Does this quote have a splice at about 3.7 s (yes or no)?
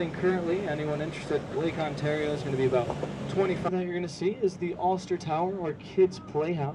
yes